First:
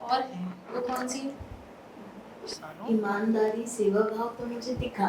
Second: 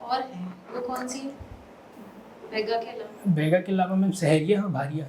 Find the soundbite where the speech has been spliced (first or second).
first